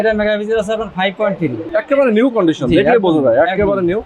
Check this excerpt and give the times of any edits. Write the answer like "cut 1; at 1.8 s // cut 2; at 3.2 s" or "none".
cut 1; at 1.6 s